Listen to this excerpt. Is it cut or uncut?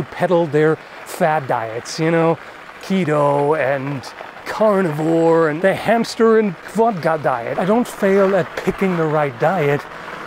cut